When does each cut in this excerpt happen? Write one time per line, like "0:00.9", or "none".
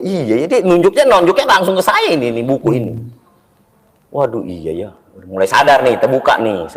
none